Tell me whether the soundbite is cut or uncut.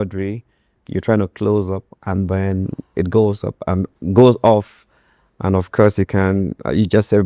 uncut